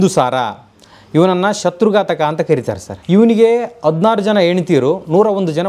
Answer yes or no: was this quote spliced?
yes